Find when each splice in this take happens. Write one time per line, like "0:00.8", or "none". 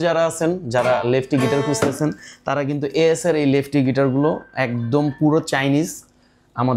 none